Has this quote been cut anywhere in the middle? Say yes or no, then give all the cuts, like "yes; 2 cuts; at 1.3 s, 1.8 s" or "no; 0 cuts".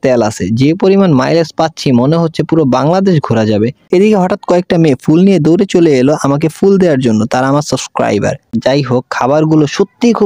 yes; 2 cuts; at 3.8 s, 8.5 s